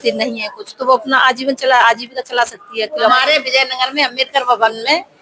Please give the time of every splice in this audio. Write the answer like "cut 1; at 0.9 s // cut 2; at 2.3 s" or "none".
cut 1; at 3.1 s